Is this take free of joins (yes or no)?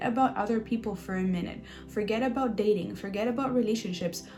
yes